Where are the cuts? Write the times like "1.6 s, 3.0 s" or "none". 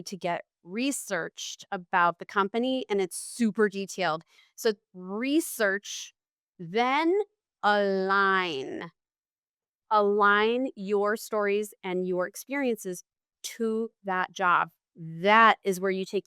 4.3 s